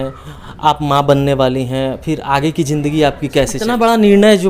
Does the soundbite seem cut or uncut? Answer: cut